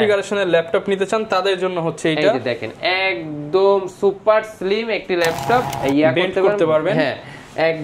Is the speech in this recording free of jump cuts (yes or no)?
no